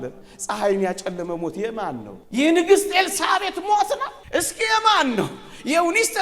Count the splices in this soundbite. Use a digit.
2